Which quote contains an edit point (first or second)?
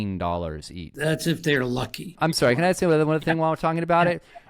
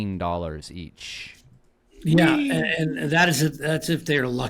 first